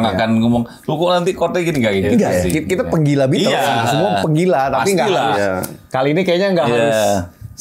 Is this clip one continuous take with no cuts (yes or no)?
yes